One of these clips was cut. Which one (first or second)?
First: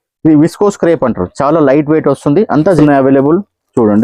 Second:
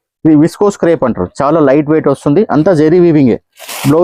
first